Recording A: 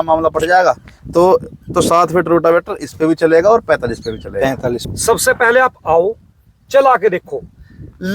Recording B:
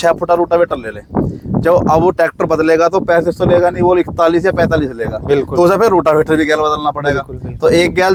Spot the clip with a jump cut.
A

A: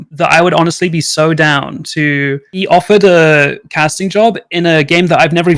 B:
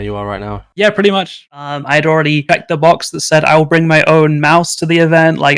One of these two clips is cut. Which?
B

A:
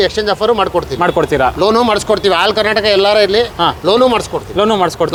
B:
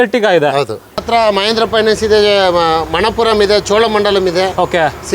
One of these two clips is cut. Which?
B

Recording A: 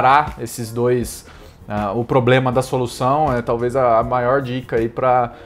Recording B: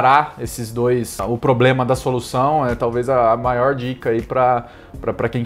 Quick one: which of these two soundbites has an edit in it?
B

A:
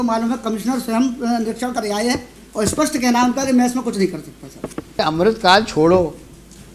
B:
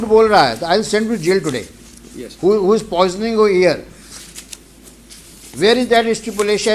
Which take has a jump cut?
A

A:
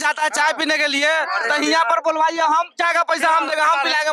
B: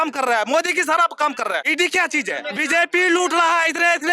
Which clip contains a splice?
B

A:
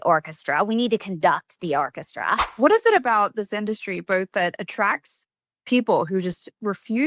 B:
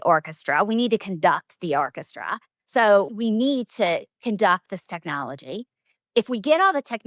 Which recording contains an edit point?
A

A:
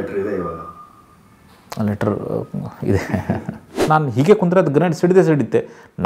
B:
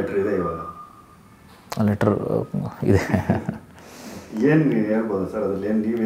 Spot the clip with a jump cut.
A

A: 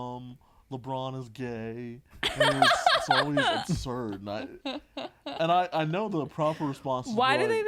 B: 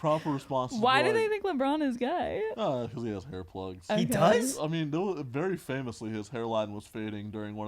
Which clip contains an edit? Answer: B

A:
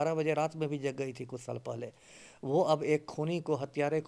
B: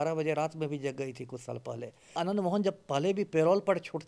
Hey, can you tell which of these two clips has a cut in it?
B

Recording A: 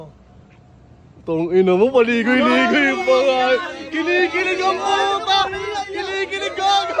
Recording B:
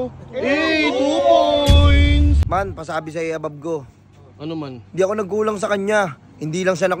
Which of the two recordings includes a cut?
B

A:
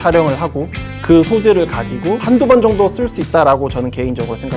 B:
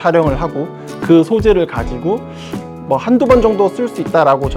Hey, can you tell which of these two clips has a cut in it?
A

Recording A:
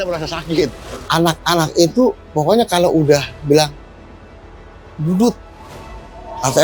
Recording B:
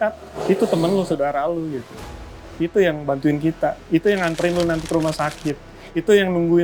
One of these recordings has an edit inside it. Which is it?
A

